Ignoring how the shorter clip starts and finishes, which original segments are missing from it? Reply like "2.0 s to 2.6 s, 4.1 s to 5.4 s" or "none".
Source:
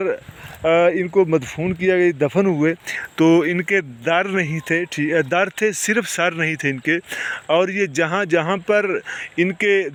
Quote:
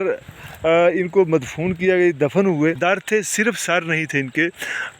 2.8 s to 5.3 s